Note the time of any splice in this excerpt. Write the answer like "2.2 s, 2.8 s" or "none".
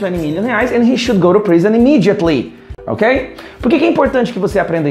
none